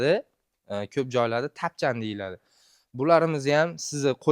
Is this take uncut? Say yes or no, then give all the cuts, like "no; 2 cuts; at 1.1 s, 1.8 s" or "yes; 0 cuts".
yes; 0 cuts